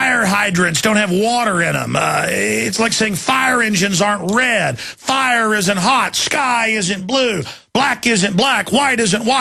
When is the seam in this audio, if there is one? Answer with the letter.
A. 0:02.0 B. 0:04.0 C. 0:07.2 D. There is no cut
A